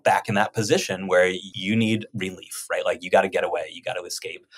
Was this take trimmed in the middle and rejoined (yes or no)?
yes